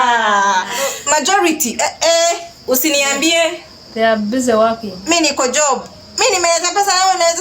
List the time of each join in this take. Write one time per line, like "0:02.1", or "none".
0:00.9